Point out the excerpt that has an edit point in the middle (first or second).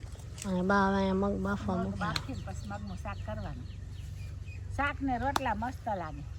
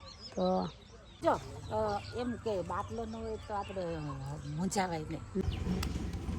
second